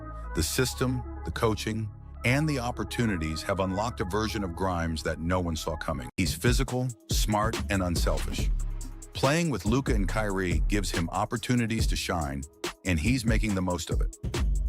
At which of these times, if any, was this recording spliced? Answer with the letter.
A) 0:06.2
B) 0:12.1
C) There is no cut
A